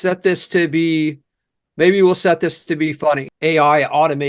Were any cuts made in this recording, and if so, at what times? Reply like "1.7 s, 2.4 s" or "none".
3.3 s